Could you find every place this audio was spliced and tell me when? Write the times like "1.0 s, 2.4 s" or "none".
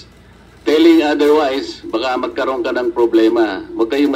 none